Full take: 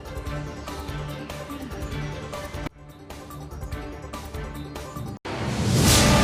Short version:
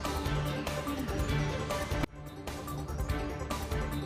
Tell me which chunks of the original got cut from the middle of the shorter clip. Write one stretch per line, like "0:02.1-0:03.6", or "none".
none